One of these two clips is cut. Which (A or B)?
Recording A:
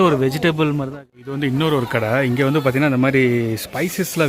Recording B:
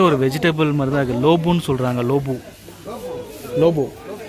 A